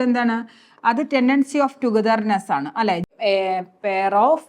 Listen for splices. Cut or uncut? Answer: cut